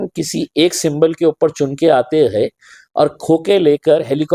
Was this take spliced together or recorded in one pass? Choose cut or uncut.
uncut